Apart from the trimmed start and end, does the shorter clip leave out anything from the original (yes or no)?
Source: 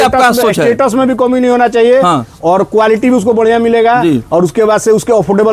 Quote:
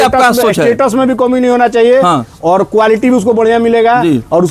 no